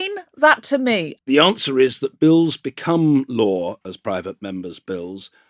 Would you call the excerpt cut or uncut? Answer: cut